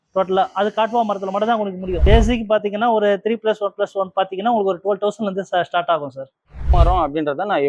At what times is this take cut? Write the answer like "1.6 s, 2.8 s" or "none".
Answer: 2.0 s, 6.7 s

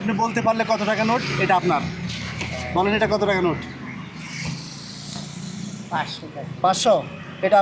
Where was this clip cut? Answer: none

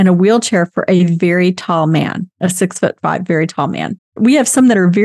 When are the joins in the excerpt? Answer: 4.2 s

